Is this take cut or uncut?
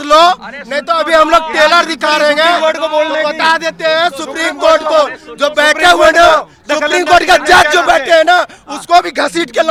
uncut